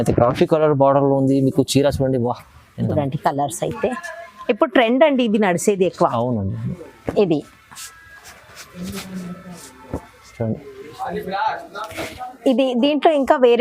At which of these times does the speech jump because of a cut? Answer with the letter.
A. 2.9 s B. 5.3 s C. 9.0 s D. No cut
A